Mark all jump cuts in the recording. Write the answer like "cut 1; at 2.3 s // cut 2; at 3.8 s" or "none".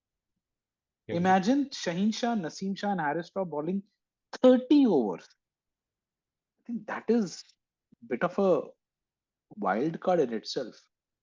cut 1; at 6.8 s